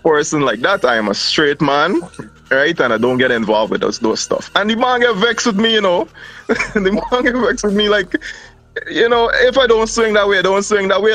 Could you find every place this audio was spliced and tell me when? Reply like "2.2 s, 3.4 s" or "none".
none

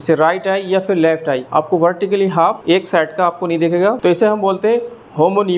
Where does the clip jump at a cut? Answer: 4.0 s

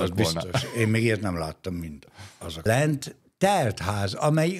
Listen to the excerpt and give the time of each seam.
2.6 s

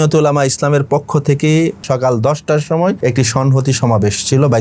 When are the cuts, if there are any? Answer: 1.8 s, 3.0 s

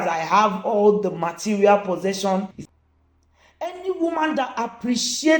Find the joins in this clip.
2.6 s

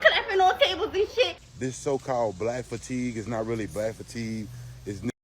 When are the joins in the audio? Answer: 1.4 s

